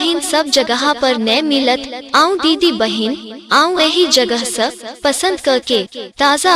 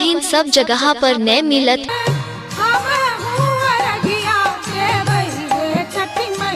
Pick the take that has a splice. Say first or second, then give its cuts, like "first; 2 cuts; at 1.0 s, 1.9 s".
first; 1 cut; at 2.0 s